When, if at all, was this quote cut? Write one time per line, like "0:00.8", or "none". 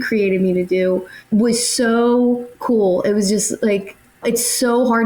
0:01.1
0:02.5